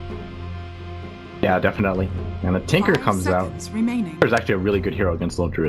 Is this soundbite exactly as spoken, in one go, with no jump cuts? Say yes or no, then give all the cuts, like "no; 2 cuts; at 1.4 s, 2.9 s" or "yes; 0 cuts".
no; 1 cut; at 0.9 s